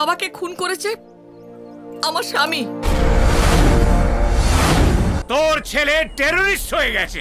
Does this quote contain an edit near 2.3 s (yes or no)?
no